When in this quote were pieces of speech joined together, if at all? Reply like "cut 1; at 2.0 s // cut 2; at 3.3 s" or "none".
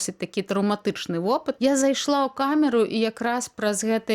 cut 1; at 1.6 s